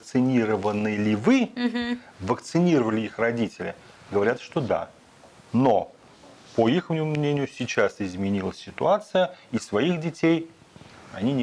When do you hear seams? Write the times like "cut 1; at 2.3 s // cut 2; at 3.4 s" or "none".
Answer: none